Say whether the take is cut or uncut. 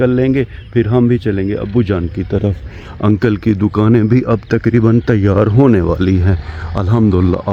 uncut